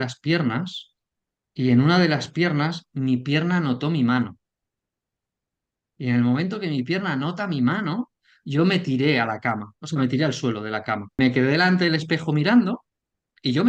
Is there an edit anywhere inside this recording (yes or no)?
yes